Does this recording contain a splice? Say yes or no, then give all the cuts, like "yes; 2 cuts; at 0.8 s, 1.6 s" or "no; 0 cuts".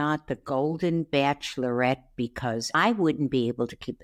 no; 0 cuts